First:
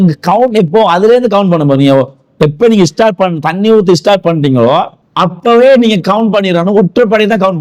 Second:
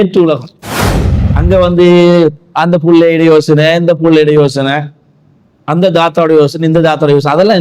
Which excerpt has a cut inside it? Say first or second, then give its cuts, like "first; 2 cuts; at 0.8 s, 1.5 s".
first; 1 cut; at 5.0 s